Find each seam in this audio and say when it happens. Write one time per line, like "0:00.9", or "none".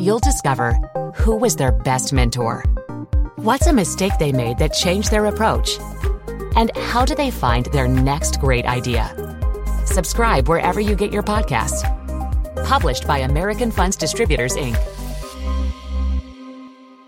none

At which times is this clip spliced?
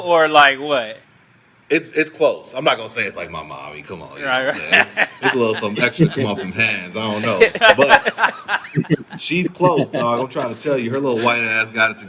none

